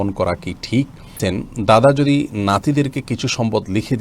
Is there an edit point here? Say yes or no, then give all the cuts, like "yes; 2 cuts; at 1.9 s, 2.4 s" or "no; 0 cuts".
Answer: yes; 1 cut; at 1.2 s